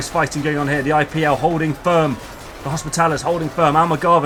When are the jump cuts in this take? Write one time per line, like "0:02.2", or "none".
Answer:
none